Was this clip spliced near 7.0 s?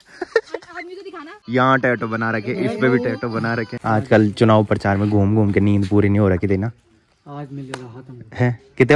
no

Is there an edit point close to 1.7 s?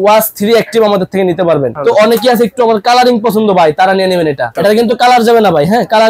yes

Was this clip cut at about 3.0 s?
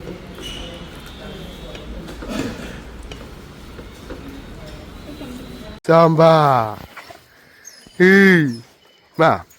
no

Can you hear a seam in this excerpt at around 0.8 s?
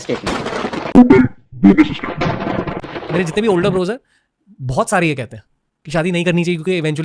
no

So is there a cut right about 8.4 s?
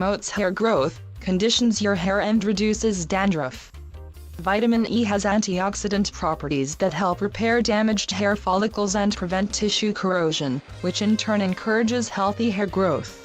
yes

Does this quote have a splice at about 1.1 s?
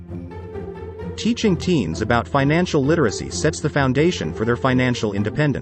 yes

